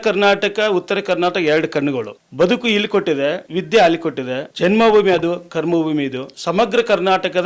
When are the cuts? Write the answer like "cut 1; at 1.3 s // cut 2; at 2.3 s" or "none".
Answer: cut 1; at 2.2 s // cut 2; at 3.4 s // cut 3; at 4.5 s // cut 4; at 6.3 s